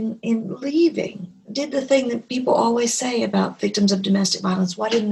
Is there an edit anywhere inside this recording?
yes; 1 cut; at 1.5 s

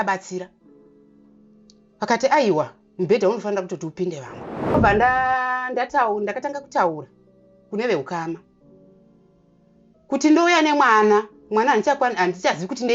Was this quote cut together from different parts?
yes; 1 cut; at 4.7 s

